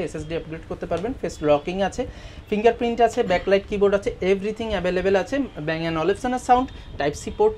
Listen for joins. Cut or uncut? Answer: uncut